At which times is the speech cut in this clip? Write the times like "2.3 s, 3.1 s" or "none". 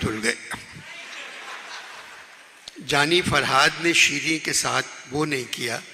none